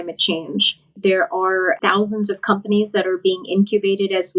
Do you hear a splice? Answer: yes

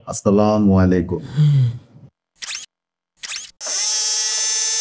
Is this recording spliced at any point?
yes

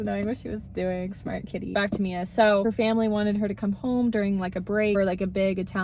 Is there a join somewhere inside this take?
no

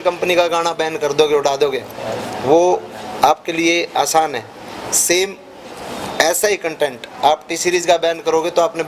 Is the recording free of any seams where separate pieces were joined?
yes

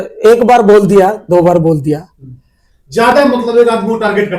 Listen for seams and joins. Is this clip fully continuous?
yes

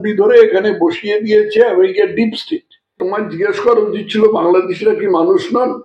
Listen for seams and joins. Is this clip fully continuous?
no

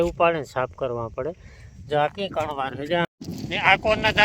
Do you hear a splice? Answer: yes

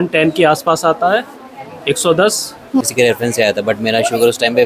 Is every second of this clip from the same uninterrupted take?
no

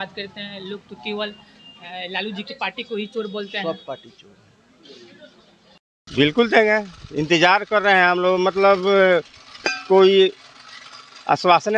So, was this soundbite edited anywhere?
yes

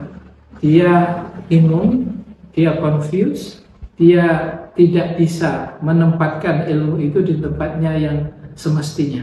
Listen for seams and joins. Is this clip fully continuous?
yes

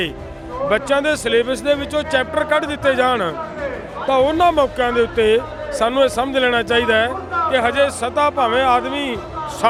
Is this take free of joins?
yes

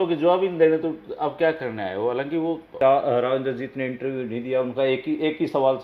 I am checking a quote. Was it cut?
yes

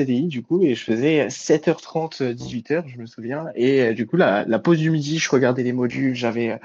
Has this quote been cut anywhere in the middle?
no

